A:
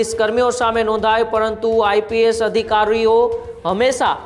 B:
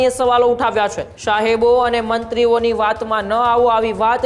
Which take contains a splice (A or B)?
B